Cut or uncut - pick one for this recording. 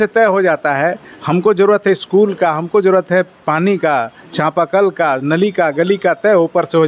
uncut